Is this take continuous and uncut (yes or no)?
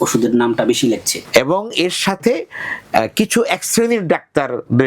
no